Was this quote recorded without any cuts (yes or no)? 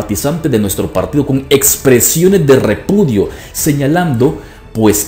yes